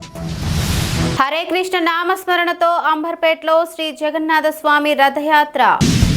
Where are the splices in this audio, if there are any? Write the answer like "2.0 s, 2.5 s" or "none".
1.2 s